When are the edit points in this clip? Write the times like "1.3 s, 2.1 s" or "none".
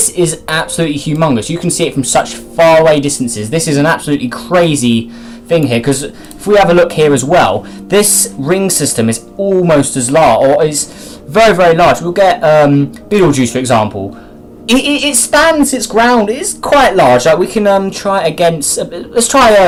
none